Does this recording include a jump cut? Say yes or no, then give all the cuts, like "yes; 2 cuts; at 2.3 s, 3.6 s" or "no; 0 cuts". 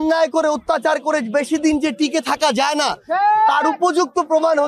no; 0 cuts